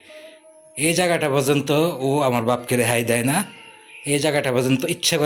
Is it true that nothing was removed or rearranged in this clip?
yes; 0 cuts

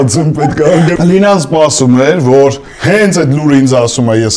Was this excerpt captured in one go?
no; 1 cut; at 0.9 s

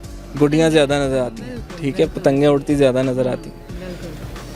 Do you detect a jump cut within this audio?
no; 0 cuts

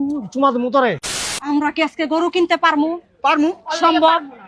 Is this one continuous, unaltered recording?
no; 1 cut; at 1.4 s

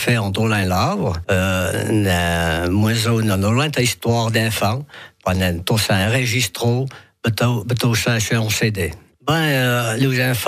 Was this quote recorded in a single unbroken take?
no; 1 cut; at 9.1 s

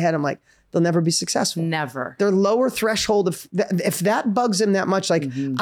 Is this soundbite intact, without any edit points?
yes; 0 cuts

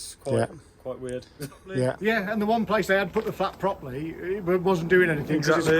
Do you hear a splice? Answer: yes; 1 cut; at 2.0 s

